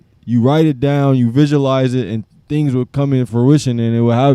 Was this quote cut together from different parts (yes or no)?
yes